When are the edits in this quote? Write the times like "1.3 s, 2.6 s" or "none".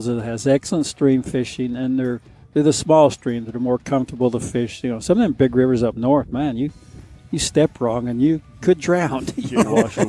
none